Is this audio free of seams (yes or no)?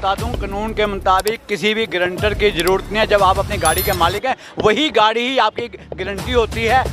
yes